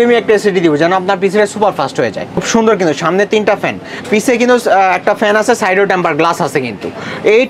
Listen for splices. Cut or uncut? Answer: cut